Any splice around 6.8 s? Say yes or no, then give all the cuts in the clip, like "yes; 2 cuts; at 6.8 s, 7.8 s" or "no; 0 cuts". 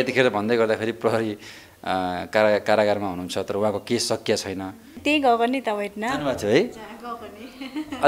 no; 1 cut; at 5.0 s